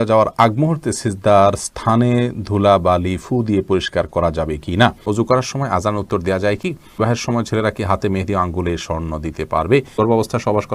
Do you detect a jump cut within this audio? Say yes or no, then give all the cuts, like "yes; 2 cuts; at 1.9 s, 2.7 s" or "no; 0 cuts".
yes; 3 cuts; at 5.0 s, 7.0 s, 10.0 s